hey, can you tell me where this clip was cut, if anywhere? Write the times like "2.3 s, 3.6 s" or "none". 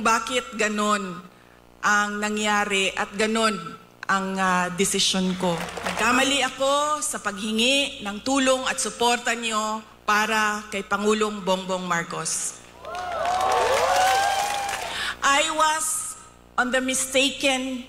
5.8 s, 14.7 s

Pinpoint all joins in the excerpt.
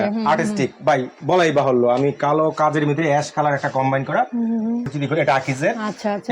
4.9 s

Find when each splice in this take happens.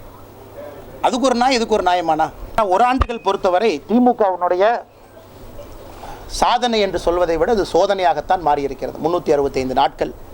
2.4 s

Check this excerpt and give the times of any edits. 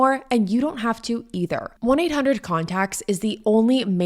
none

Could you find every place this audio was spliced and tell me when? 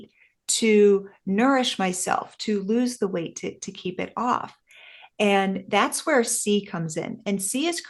none

